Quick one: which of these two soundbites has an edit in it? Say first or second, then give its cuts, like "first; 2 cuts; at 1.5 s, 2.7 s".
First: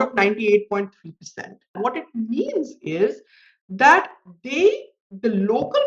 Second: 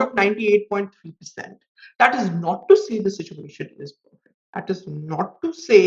first; 1 cut; at 1.7 s